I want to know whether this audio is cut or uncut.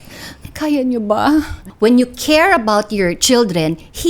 cut